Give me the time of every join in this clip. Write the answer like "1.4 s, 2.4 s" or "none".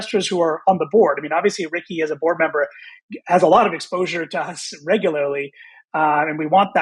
none